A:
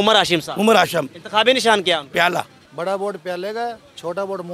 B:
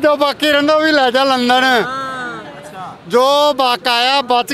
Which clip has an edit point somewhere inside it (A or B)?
A